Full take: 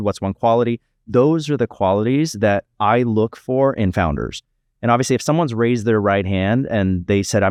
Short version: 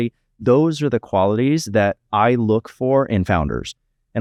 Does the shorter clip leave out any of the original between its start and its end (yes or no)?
no